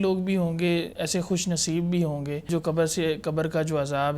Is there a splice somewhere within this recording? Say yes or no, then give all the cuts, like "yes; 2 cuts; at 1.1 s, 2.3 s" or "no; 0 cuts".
yes; 2 cuts; at 1.0 s, 2.5 s